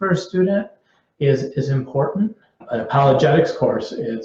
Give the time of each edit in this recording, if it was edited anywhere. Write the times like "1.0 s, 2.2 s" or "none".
2.6 s